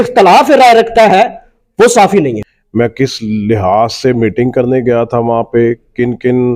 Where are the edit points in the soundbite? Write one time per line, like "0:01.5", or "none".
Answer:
0:02.5